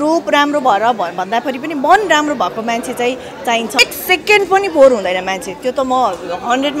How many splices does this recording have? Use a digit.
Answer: 1